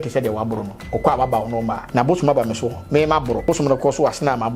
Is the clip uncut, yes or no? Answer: no